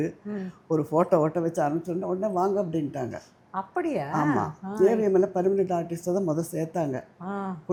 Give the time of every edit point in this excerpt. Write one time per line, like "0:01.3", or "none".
none